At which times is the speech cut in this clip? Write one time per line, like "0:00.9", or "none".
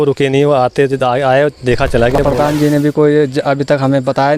0:02.2